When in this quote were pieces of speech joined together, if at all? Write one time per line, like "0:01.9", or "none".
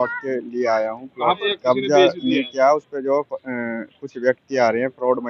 0:01.4